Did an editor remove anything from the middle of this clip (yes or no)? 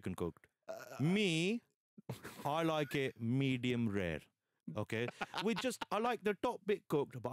no